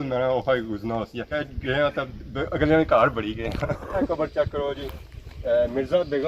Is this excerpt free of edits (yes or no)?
no